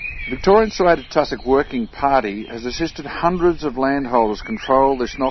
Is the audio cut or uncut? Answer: uncut